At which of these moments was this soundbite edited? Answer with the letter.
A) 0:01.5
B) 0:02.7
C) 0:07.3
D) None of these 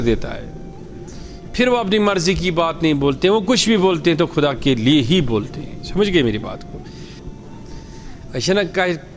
C